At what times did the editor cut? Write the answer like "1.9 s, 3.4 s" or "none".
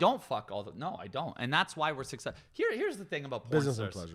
none

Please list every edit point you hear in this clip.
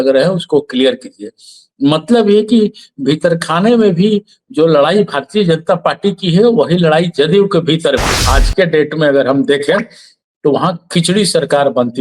8.2 s

